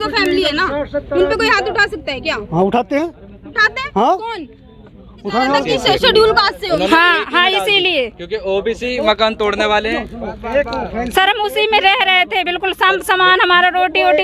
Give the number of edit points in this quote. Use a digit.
1